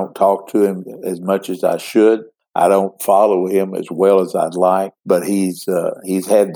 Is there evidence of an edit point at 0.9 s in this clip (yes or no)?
no